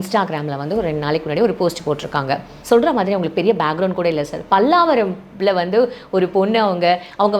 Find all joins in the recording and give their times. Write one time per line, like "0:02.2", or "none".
0:02.5